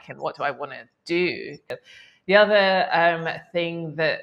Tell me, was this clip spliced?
yes; 1 cut; at 1.7 s

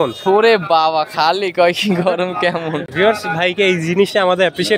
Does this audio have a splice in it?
yes; 1 cut; at 2.9 s

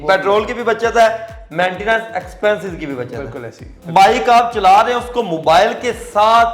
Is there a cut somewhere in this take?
yes; 1 cut; at 3.8 s

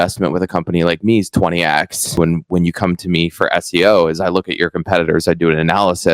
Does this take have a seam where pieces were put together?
yes; 1 cut; at 2.2 s

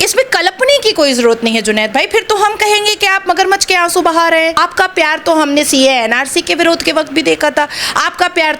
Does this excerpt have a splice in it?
yes; 1 cut; at 4.6 s

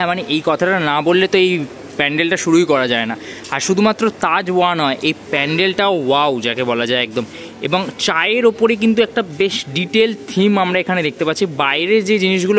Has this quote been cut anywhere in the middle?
no; 0 cuts

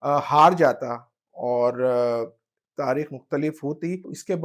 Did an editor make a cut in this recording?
no; 0 cuts

